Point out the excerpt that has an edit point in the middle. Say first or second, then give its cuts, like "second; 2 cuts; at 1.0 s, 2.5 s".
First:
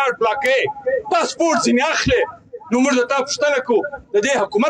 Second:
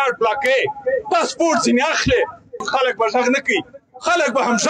second; 1 cut; at 2.6 s